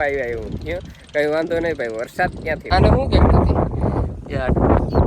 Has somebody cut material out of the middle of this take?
yes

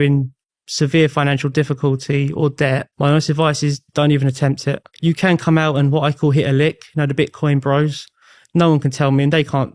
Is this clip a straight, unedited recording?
no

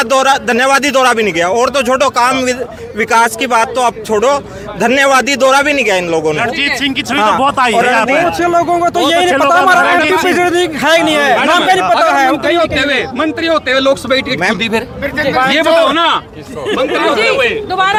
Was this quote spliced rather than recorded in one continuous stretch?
no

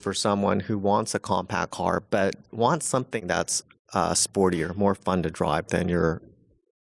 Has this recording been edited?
yes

